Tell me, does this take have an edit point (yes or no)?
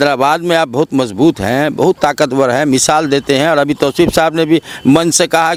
no